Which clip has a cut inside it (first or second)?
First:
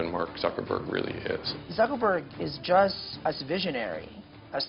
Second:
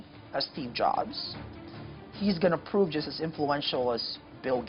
first